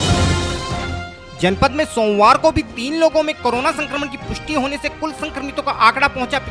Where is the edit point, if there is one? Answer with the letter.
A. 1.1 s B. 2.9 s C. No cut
A